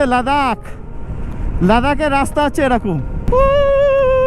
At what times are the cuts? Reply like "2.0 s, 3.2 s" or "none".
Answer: 3.2 s